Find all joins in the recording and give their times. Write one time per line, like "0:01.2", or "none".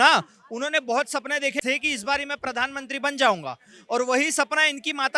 0:01.6